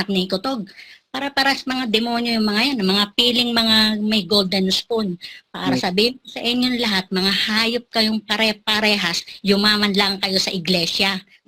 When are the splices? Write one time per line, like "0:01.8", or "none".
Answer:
none